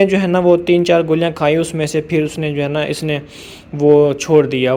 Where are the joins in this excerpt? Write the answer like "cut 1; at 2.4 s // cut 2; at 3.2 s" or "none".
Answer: none

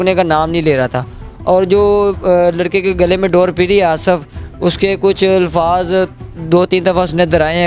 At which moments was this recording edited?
none

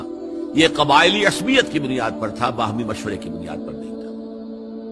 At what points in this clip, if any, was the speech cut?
cut 1; at 3.3 s

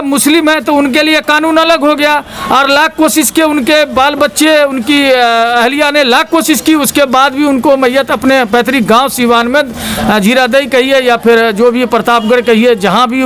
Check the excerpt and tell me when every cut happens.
none

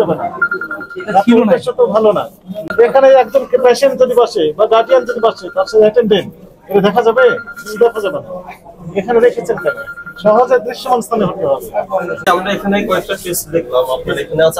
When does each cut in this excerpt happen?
cut 1; at 2.7 s // cut 2; at 12.3 s

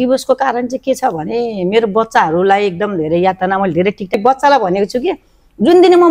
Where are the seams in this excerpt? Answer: cut 1; at 4.1 s

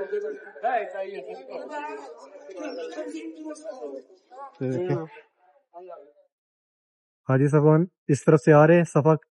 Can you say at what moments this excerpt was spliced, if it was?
none

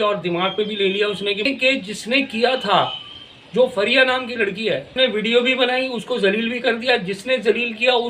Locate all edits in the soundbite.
cut 1; at 1.5 s // cut 2; at 4.9 s

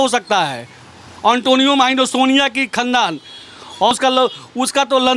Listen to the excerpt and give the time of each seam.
cut 1; at 3.9 s

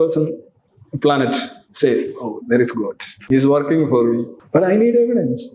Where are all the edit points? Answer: cut 1; at 3.1 s // cut 2; at 4.3 s

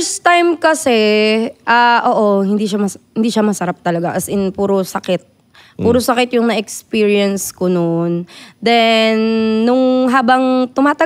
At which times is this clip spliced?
none

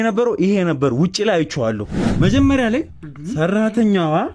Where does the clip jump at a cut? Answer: cut 1; at 1.9 s

